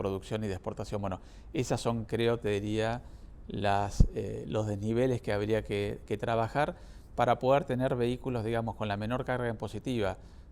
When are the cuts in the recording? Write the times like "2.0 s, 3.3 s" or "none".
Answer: none